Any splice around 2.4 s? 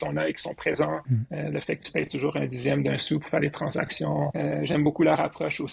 no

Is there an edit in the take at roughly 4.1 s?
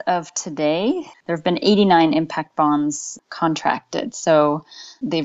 no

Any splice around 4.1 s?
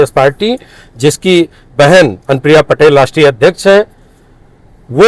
no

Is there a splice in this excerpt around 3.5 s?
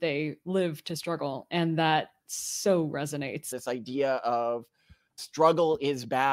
yes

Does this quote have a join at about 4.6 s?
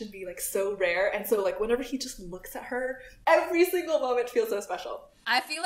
yes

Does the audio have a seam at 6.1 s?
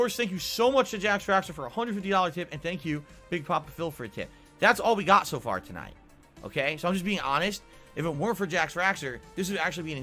no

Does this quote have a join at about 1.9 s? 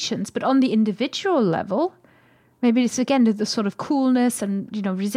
no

